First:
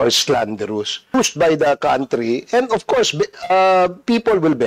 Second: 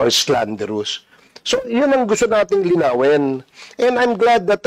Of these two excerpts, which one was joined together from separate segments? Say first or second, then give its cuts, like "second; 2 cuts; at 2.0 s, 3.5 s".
first; 1 cut; at 1.1 s